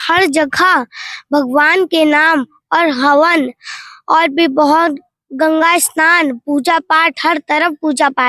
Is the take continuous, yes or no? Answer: yes